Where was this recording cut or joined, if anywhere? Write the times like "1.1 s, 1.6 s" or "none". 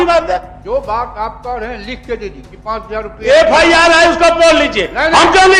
2.5 s